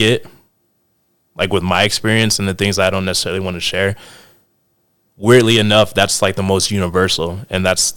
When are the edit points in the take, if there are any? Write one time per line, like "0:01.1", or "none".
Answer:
none

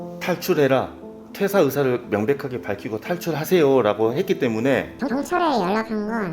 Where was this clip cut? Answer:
0:04.9

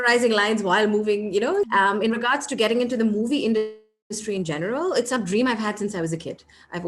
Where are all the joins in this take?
0:01.7

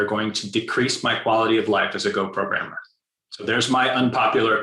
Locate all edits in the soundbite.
0:03.5

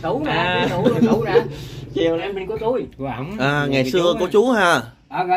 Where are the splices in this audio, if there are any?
0:02.3

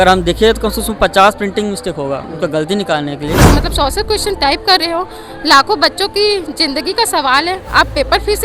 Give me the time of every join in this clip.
0:02.3
0:03.4

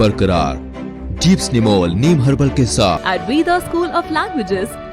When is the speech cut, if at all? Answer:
0:03.0

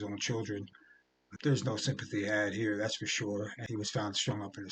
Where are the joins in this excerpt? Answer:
0:01.2
0:03.6

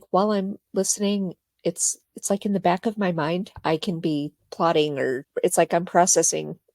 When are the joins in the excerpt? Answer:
0:04.4
0:05.2

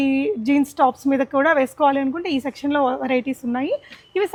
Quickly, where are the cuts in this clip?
none

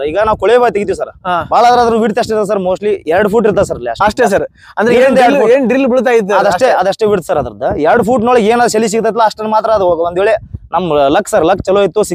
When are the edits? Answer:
none

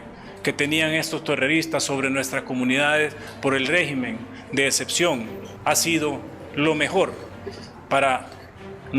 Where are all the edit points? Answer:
0:05.4

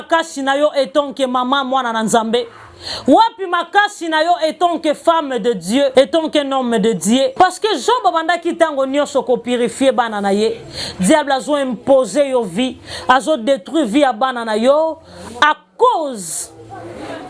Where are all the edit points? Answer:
0:05.9
0:07.3

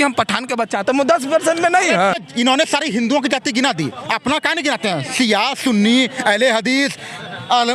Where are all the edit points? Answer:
0:02.2

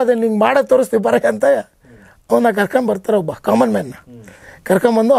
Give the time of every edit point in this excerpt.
none

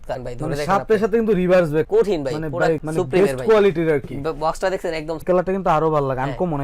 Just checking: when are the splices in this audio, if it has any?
0:05.2

